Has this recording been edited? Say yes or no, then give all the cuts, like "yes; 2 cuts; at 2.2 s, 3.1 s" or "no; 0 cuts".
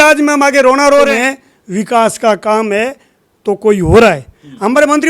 yes; 1 cut; at 1.1 s